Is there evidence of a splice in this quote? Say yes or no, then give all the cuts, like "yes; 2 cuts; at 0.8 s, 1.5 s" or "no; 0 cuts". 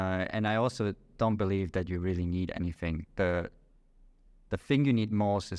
no; 0 cuts